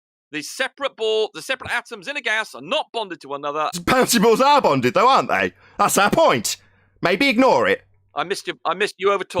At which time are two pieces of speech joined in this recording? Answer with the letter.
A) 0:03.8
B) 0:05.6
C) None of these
A